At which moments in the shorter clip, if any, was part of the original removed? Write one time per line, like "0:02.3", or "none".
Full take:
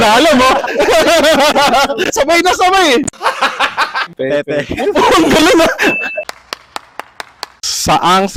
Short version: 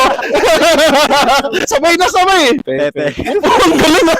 0:02.6